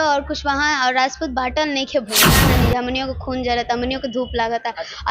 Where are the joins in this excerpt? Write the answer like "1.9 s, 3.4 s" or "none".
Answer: 2.3 s